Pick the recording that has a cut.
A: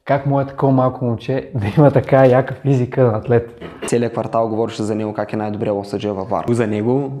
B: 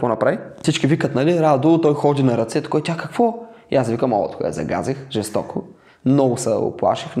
A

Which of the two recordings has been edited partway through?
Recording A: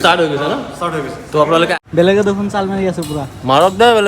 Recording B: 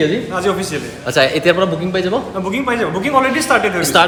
A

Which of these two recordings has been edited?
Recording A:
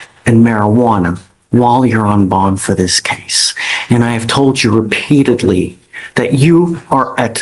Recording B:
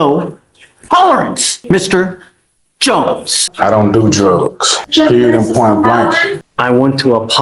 B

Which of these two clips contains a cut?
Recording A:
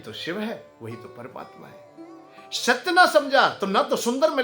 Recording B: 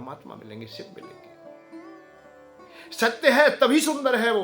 B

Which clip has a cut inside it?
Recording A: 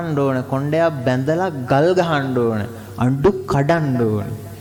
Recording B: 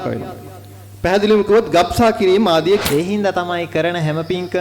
B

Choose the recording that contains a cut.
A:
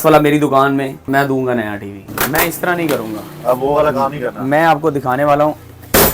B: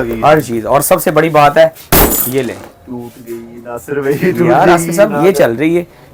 A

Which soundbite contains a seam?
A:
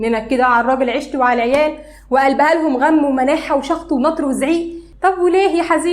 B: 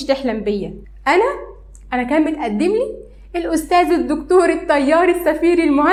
A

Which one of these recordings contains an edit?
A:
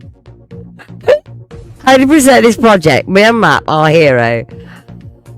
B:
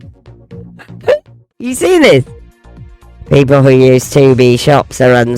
B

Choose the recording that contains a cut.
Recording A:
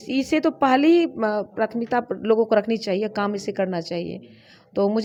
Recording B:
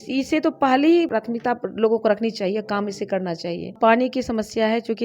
B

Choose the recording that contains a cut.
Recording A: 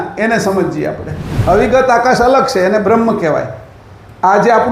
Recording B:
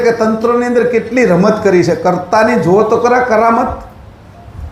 A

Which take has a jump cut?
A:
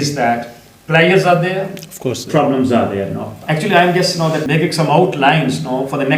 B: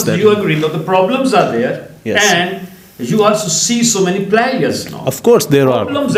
A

